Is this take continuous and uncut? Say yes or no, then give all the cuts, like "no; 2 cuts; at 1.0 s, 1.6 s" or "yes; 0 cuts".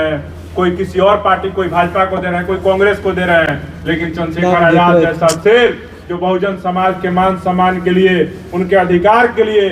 yes; 0 cuts